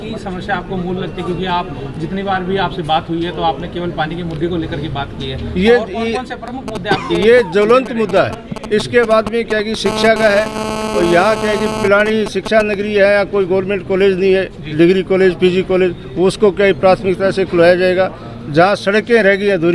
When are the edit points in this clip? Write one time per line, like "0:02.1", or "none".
none